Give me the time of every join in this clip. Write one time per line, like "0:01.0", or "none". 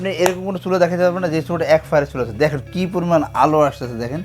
none